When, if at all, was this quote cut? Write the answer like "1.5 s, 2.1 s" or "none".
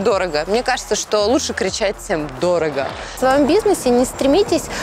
3.1 s